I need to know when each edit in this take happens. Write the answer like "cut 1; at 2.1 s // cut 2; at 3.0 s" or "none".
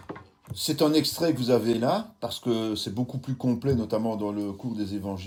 none